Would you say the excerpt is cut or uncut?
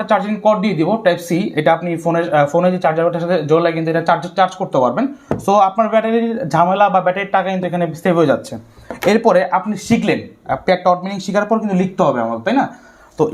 uncut